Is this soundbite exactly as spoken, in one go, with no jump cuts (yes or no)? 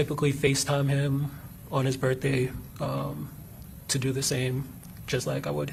yes